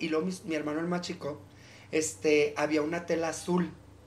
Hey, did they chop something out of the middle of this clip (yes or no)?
no